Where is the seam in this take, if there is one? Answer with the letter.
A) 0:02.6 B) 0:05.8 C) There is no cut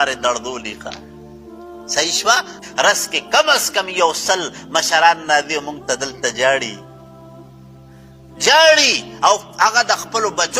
A